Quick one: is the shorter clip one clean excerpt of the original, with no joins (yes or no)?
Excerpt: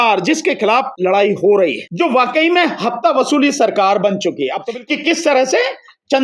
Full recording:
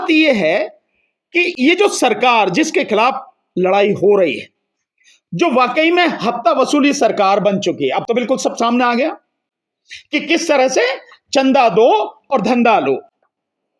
no